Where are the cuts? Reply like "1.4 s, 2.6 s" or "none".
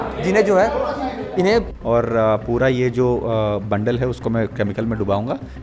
1.7 s